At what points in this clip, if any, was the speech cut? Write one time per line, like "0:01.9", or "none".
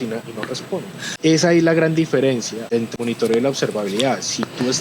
0:01.1
0:02.9